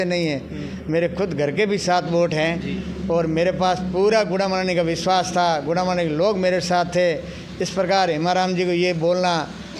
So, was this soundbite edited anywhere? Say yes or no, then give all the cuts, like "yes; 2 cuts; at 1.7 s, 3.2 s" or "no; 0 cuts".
no; 0 cuts